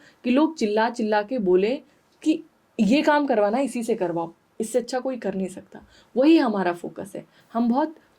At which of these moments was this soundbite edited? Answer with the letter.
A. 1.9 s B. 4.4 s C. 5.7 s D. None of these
D